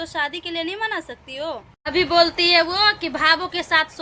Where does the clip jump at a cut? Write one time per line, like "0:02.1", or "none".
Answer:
0:01.7